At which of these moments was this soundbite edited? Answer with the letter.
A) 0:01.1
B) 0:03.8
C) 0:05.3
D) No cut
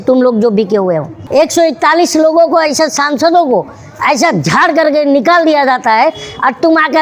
A